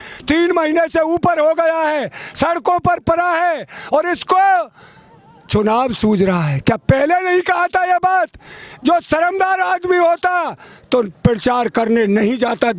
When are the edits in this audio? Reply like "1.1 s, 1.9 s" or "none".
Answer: none